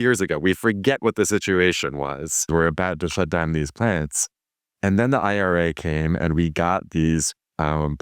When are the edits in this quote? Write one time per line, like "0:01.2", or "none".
0:02.5